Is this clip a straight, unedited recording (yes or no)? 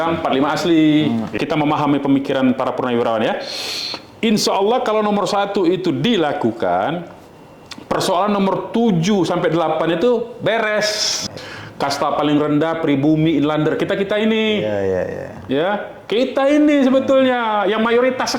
no